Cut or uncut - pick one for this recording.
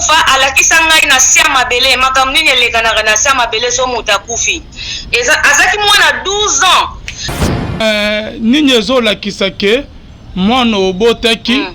cut